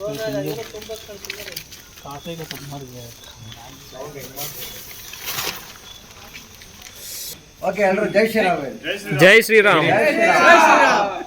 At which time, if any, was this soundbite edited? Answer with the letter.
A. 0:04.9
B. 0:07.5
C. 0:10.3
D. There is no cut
B